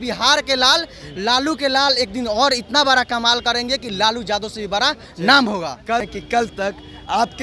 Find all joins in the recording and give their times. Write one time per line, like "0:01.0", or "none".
0:06.1